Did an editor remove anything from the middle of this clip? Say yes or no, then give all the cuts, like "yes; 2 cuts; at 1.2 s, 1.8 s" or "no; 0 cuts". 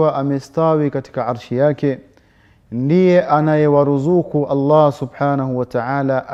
no; 0 cuts